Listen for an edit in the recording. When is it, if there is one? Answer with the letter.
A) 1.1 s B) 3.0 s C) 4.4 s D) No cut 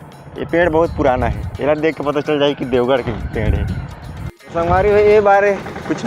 C